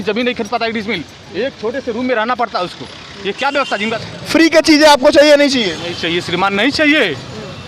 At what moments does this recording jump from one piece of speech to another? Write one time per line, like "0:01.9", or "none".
0:03.9